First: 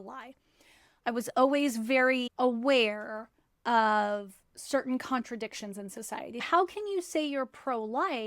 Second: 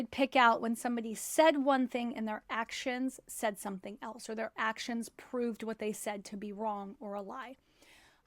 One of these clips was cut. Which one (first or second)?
first